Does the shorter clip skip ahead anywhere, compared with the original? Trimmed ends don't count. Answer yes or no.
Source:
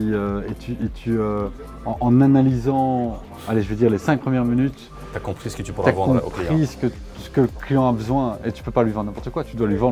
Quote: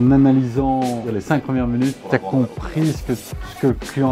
yes